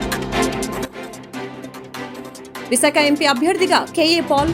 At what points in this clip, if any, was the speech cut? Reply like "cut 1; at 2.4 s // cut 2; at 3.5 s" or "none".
cut 1; at 2.7 s